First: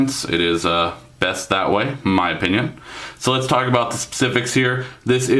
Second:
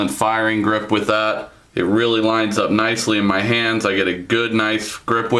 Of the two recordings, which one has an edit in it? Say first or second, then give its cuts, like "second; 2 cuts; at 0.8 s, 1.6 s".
second; 1 cut; at 4.2 s